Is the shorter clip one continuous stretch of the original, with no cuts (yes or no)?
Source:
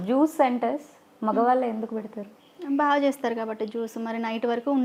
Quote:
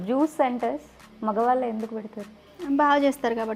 yes